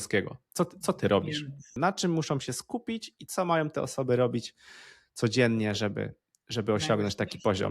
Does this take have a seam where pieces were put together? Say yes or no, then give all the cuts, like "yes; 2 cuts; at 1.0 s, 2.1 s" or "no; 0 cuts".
yes; 1 cut; at 1.8 s